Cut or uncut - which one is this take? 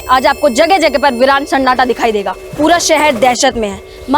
cut